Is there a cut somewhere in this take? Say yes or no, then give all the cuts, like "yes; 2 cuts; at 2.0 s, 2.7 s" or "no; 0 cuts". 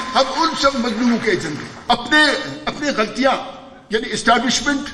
yes; 1 cut; at 1.7 s